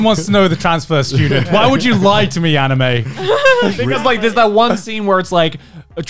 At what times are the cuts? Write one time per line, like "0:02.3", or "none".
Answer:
none